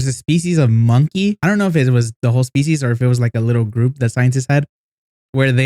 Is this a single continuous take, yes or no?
no